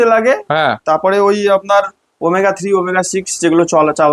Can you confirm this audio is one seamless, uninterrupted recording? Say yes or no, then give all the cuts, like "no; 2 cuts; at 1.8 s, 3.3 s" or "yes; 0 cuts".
yes; 0 cuts